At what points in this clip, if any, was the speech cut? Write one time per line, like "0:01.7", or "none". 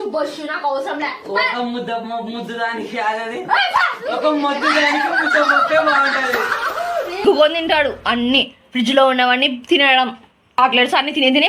0:07.2
0:10.6

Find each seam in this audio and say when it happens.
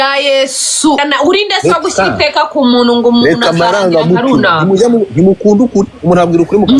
0:01.0

